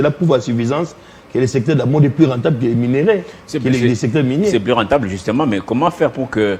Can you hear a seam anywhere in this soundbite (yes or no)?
no